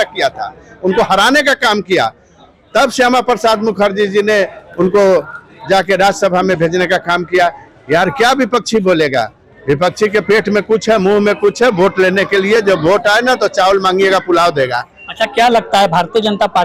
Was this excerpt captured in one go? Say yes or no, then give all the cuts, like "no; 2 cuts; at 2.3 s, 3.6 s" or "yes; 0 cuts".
yes; 0 cuts